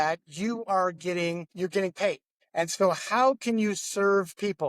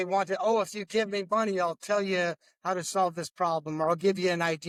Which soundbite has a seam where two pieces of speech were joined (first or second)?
first